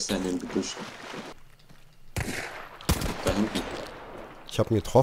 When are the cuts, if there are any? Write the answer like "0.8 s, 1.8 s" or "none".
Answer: 1.3 s